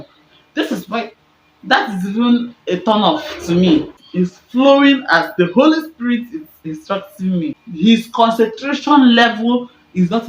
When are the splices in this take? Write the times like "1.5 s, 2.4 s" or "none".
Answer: 4.0 s, 7.6 s